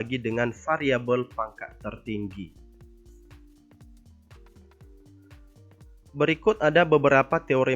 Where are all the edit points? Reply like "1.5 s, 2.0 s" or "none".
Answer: 2.6 s, 6.1 s